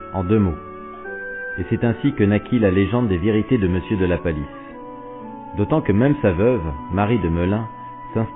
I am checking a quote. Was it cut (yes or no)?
no